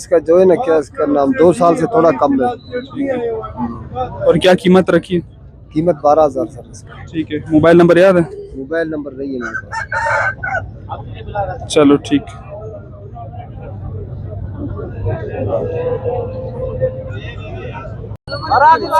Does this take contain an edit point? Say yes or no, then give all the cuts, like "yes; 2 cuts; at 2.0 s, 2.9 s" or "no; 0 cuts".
no; 0 cuts